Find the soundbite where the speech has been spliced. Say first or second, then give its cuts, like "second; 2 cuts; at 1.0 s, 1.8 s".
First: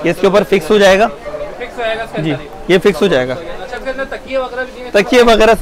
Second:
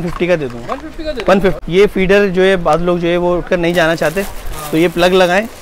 second; 1 cut; at 1.6 s